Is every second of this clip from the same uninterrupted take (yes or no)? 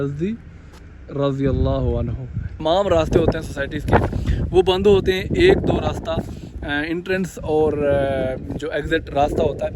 no